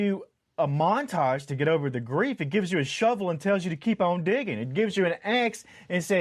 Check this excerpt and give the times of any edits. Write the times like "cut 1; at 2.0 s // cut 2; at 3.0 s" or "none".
none